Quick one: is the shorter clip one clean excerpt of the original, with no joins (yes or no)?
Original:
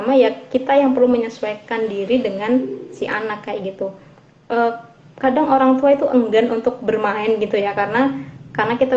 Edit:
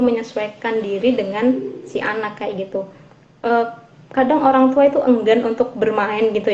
yes